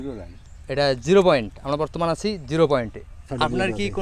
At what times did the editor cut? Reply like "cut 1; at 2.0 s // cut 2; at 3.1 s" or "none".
cut 1; at 3.0 s